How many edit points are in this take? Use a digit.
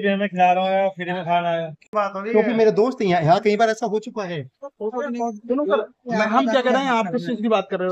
1